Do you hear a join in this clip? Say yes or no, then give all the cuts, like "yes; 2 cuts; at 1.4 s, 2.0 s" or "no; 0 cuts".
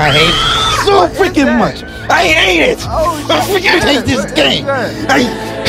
no; 0 cuts